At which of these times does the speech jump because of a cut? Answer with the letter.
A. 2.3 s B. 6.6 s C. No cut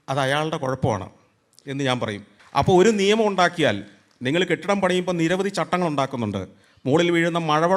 A